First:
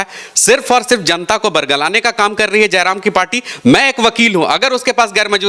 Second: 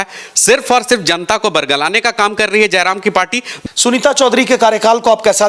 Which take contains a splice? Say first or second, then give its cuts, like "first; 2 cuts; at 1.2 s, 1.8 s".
second; 1 cut; at 3.5 s